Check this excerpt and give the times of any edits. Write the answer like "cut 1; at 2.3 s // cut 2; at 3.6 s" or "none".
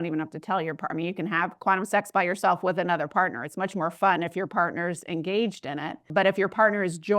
cut 1; at 6.1 s